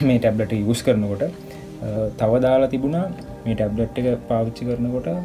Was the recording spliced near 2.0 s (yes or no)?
yes